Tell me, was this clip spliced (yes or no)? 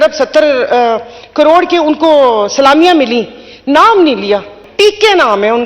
yes